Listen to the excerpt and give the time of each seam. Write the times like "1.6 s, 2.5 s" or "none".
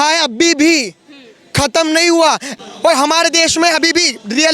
2.5 s